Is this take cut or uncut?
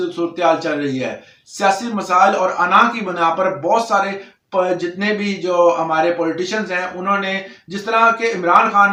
uncut